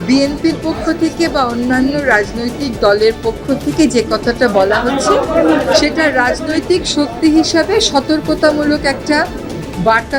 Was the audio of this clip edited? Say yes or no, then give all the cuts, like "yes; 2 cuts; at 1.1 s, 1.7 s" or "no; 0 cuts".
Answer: no; 0 cuts